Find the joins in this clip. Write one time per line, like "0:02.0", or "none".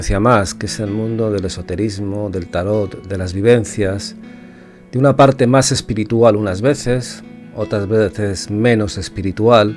none